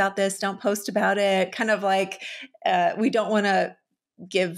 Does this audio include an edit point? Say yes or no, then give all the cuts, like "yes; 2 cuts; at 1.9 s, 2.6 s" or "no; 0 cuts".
no; 0 cuts